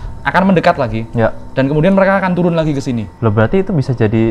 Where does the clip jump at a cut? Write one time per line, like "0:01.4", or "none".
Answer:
0:03.1